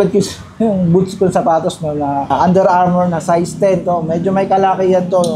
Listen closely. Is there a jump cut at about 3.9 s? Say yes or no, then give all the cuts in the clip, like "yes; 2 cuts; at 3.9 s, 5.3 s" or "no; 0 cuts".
no; 1 cut; at 2.3 s